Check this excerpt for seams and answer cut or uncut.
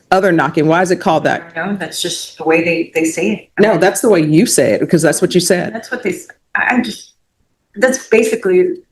uncut